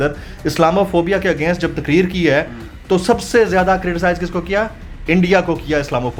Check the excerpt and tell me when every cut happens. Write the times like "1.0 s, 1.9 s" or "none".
none

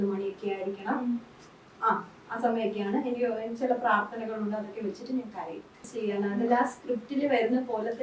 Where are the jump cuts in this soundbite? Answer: 5.8 s

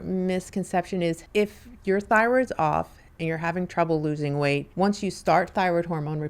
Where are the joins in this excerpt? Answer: 1.2 s, 4.7 s

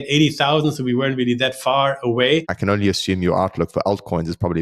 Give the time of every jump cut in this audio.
2.5 s

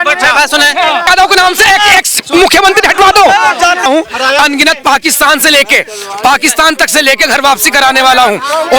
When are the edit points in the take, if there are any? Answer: 1.0 s, 3.9 s

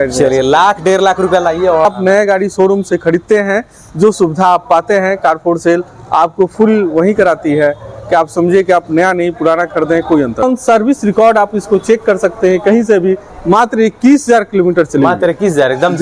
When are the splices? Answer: 1.8 s, 10.4 s

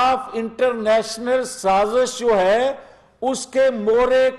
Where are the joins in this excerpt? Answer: none

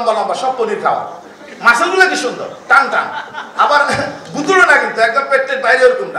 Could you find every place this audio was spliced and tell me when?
none

